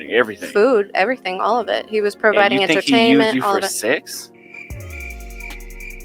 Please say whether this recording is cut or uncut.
uncut